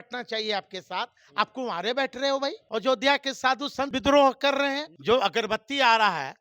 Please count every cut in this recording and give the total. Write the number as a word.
three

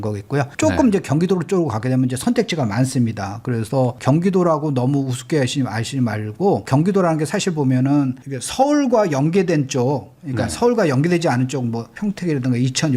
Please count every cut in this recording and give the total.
zero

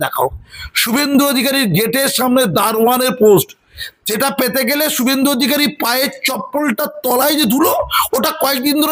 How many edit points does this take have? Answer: zero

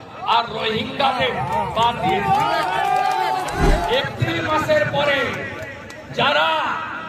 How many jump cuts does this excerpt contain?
one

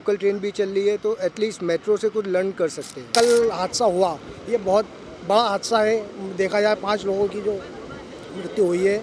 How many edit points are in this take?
one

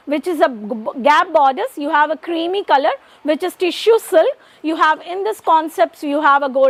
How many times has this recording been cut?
zero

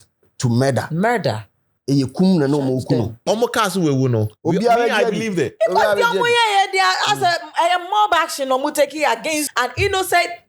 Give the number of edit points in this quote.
two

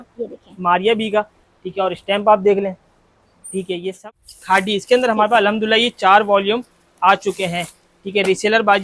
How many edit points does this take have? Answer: one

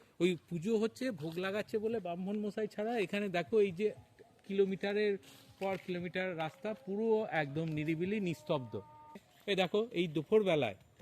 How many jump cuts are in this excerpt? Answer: one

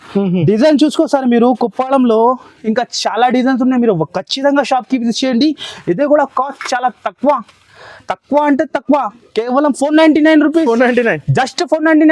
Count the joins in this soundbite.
zero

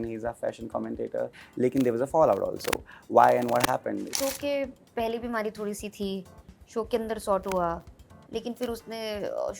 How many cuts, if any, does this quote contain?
two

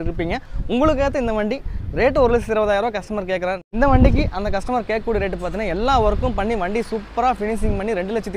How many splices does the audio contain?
one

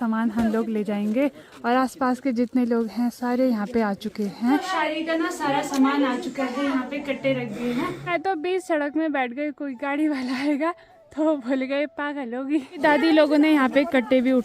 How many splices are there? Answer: three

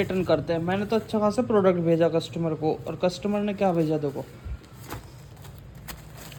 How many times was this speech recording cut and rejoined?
zero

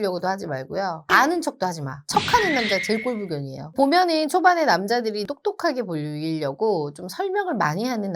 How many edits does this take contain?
two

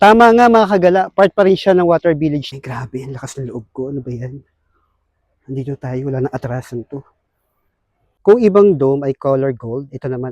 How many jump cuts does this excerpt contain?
two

